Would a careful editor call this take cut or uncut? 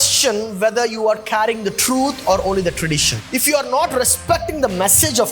cut